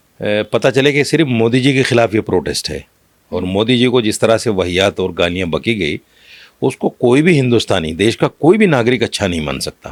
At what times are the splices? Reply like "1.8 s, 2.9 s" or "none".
none